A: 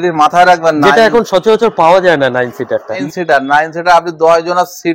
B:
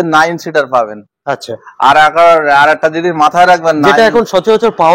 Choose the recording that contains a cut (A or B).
A